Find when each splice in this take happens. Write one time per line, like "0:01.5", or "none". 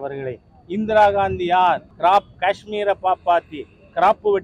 0:01.9